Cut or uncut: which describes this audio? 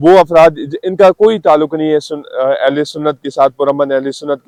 uncut